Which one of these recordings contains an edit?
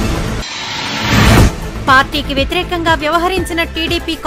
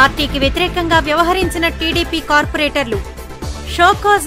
first; 1 cut; at 0.9 s

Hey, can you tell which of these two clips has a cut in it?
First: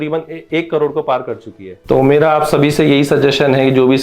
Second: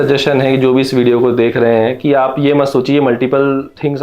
first; 1 cut; at 1.7 s

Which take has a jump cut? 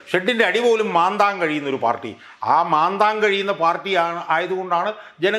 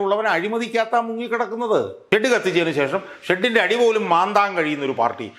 second; 1 cut; at 2.0 s

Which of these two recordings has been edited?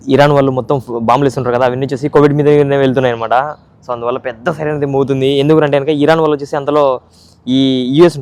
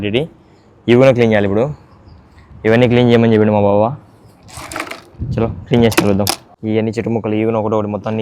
second; 1 cut; at 6.5 s

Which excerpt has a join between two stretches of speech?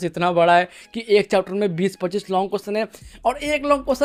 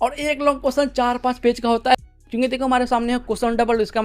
second; 1 cut; at 2.2 s

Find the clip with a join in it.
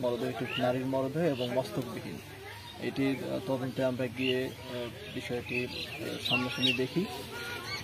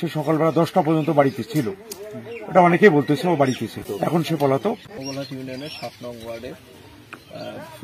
second; 2 cuts; at 3.9 s, 4.9 s

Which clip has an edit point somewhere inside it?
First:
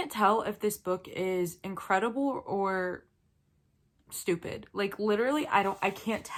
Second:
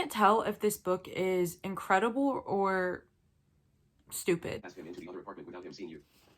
second; 1 cut; at 4.7 s

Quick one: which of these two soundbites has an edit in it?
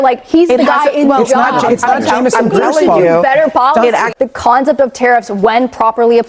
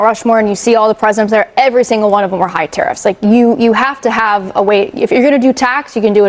first; 1 cut; at 4.2 s

